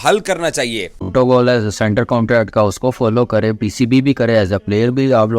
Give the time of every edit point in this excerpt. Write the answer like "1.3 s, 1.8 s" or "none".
1.1 s